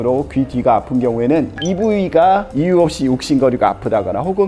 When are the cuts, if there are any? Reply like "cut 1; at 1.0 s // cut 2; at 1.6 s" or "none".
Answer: cut 1; at 1.5 s